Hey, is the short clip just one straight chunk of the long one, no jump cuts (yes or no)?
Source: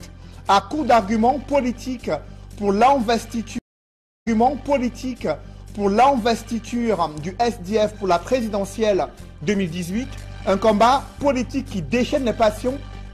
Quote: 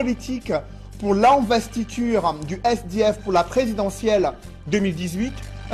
no